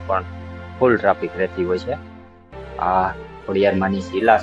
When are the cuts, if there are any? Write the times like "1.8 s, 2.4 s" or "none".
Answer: 2.5 s